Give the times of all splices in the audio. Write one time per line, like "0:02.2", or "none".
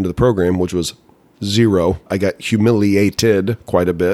0:02.1